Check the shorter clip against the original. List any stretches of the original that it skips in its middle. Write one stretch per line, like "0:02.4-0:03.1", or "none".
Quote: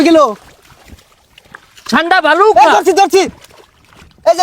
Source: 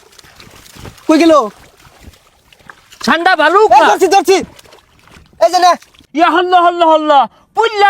none